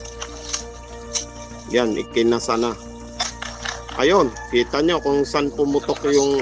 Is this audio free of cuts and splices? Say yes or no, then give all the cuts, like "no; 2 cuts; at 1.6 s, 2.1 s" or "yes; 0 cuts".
no; 1 cut; at 5.5 s